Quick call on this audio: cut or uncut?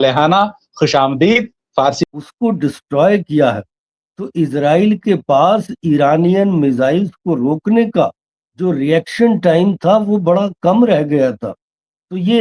cut